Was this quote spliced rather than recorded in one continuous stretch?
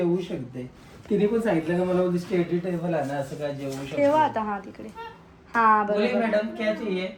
no; 0 cuts

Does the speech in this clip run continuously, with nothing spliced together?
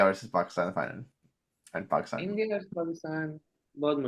yes; 0 cuts

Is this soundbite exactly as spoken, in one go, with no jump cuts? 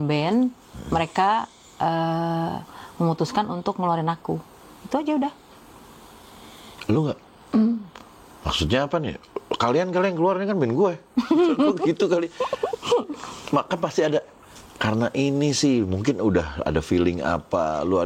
yes; 0 cuts

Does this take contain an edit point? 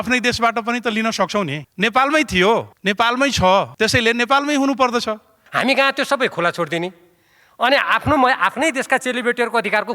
yes; 4 cuts; at 1.6 s, 2.7 s, 3.7 s, 5.4 s

